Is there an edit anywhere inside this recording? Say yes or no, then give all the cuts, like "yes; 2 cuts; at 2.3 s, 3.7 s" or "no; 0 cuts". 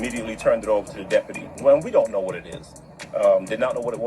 yes; 1 cut; at 1.5 s